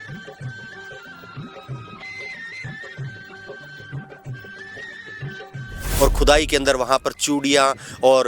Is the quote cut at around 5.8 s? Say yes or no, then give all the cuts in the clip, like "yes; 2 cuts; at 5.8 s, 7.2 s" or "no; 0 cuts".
yes; 1 cut; at 5.8 s